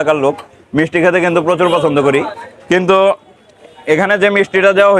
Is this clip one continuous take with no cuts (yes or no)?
yes